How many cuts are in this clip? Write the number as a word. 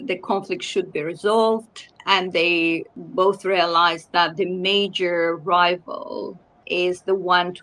three